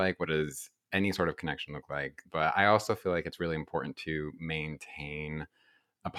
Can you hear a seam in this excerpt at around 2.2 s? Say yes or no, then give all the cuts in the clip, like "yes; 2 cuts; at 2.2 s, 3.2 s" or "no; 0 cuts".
yes; 1 cut; at 2.2 s